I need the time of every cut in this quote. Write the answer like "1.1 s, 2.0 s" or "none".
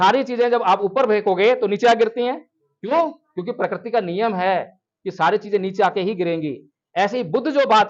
none